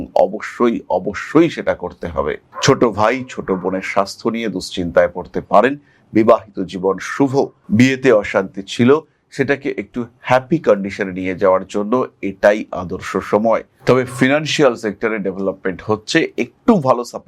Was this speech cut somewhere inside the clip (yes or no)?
yes